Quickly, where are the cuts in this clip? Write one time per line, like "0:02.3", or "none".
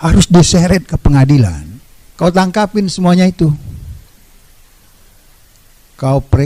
0:02.0